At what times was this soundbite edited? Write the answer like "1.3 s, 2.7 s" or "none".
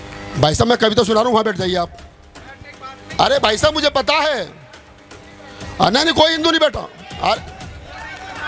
none

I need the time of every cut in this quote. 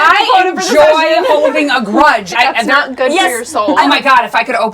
2.3 s, 3.8 s

